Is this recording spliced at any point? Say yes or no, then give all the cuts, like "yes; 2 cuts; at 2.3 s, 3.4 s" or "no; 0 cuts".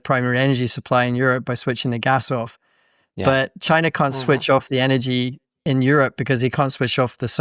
yes; 1 cut; at 5.6 s